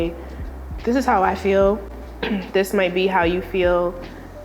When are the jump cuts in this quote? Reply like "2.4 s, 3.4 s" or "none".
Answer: none